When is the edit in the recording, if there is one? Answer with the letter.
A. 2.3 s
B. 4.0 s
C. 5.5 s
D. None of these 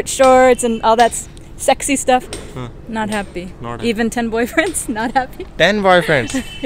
D